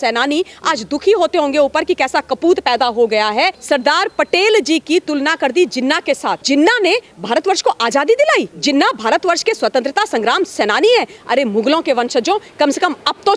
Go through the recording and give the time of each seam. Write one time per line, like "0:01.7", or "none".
0:03.6
0:06.4
0:08.5